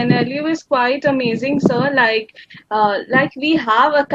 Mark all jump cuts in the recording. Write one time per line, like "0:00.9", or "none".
none